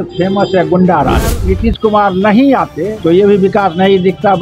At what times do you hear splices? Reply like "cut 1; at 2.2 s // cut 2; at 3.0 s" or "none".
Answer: cut 1; at 1.4 s // cut 2; at 2.9 s